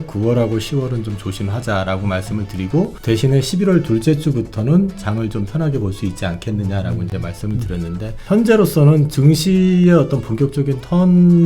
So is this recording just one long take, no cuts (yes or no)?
no